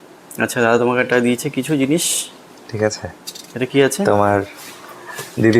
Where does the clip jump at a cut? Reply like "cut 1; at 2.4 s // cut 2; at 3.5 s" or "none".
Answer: none